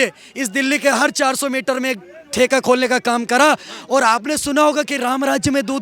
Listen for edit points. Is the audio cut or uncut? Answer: uncut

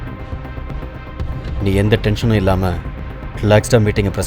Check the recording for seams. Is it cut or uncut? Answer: cut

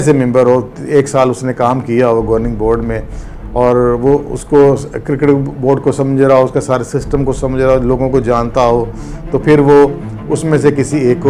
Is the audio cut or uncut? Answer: uncut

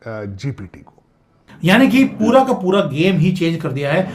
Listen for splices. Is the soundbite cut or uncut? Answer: cut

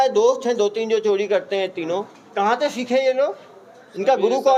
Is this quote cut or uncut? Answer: uncut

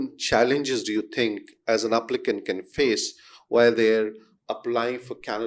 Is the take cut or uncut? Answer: uncut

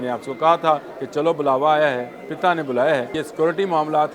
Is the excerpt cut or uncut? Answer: cut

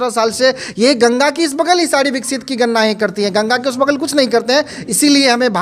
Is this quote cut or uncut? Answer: uncut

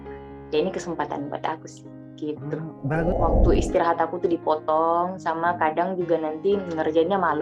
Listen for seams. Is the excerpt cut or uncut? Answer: cut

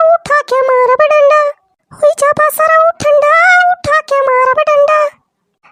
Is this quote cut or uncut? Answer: uncut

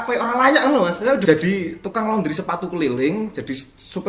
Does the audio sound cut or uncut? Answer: cut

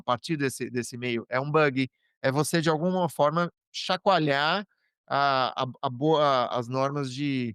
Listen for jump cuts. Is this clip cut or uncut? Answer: uncut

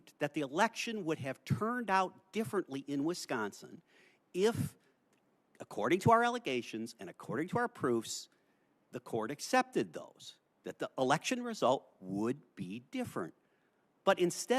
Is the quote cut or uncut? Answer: uncut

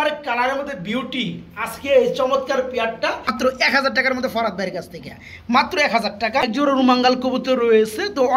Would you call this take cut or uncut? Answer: cut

